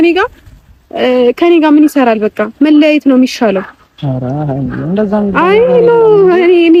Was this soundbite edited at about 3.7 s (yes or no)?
no